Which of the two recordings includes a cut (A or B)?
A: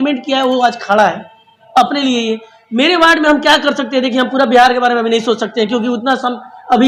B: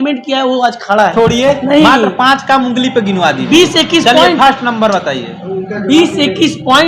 B